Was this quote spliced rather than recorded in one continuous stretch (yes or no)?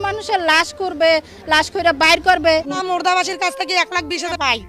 yes